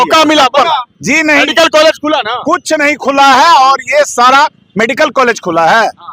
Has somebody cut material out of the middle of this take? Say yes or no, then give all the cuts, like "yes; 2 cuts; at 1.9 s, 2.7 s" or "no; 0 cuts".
no; 0 cuts